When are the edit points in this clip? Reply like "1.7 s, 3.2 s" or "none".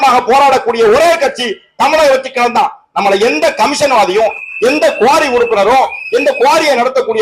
none